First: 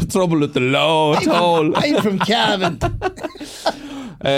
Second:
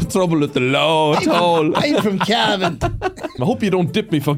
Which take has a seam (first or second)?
second